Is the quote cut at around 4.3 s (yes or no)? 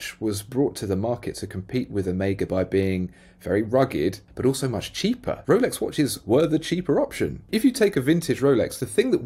yes